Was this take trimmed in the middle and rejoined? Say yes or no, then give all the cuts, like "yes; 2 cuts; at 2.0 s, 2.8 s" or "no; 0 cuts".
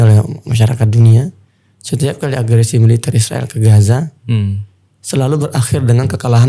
no; 0 cuts